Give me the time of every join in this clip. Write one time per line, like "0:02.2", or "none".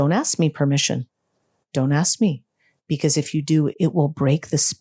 0:03.7